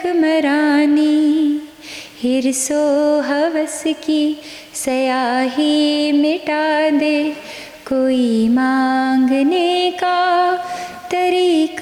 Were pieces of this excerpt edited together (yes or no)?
no